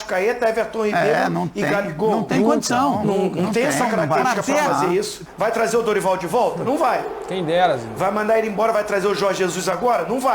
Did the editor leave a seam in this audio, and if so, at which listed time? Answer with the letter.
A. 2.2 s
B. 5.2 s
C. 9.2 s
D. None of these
B